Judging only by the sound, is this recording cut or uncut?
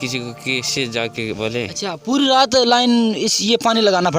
cut